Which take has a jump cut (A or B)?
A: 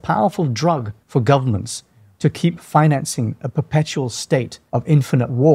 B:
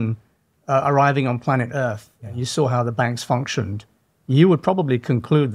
A